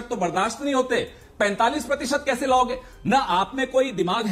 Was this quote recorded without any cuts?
yes; 0 cuts

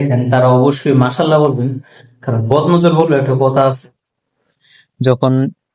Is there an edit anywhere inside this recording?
yes; 1 cut; at 4.1 s

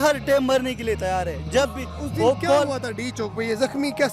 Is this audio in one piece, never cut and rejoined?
yes; 0 cuts

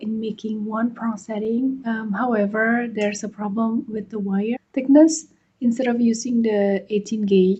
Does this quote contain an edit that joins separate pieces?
no; 0 cuts

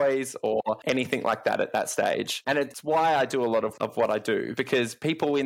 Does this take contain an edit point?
yes; 4 cuts; at 0.8 s, 2.5 s, 3.7 s, 4.5 s

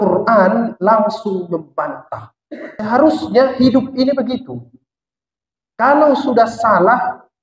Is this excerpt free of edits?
no; 1 cut; at 2.7 s

